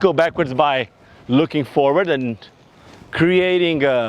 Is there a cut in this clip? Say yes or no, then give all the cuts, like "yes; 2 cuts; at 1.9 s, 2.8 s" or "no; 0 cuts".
no; 0 cuts